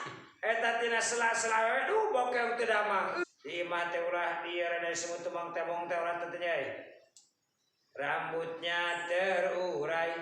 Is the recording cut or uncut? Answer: cut